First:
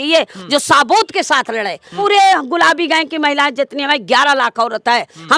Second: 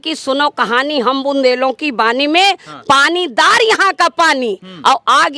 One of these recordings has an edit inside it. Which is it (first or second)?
first